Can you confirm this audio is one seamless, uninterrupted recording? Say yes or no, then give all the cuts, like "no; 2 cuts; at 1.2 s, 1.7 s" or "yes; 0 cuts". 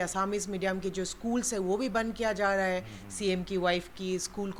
yes; 0 cuts